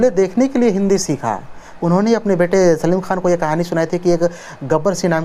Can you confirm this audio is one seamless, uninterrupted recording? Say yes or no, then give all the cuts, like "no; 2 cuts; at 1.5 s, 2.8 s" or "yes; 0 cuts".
no; 1 cut; at 1.7 s